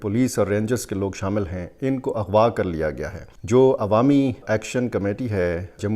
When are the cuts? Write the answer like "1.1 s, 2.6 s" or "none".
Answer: 4.4 s